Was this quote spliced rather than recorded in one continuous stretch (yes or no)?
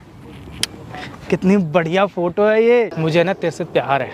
yes